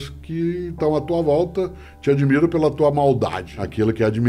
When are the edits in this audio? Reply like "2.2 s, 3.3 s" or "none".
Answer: none